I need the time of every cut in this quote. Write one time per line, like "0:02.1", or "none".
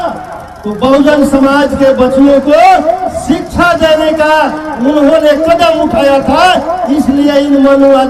none